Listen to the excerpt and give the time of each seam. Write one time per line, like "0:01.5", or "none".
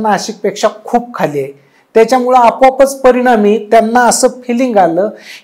none